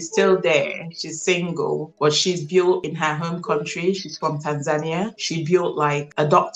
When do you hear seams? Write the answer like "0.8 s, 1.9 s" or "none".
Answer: none